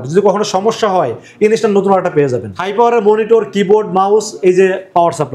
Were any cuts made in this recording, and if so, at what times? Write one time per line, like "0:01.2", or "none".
0:02.5